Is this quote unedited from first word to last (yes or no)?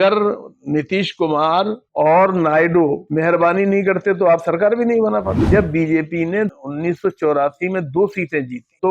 no